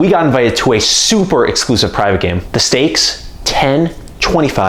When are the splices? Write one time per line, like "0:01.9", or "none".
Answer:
0:02.4